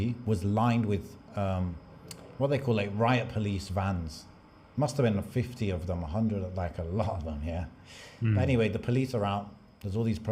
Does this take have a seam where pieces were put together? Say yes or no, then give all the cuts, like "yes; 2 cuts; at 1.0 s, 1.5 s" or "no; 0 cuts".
no; 0 cuts